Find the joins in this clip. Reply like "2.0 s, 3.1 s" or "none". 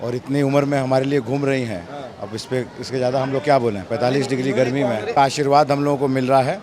5.1 s